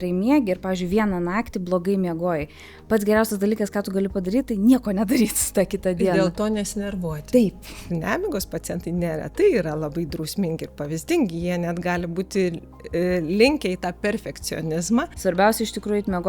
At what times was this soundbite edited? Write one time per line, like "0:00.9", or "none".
0:07.9
0:15.1